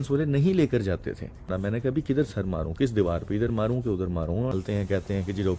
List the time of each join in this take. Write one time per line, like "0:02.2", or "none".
0:01.5
0:04.5